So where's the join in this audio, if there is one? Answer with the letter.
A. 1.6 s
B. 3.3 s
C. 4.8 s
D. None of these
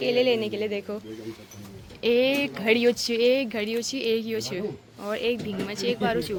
D